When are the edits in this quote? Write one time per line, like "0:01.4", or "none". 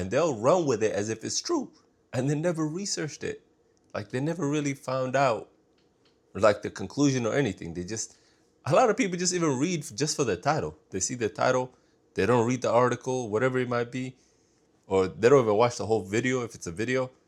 none